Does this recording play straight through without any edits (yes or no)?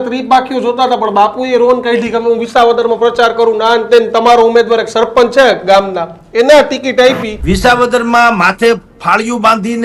no